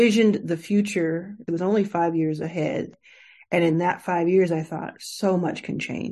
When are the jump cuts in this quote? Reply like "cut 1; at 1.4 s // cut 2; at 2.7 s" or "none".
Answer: cut 1; at 1.5 s // cut 2; at 2.9 s